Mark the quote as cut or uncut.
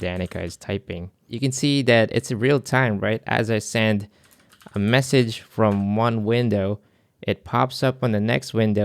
cut